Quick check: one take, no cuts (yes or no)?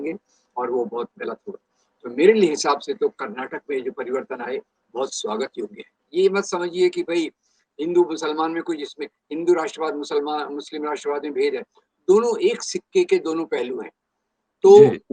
no